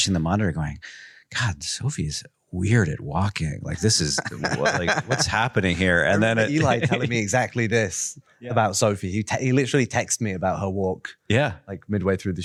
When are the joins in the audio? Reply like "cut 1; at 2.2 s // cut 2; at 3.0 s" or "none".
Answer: none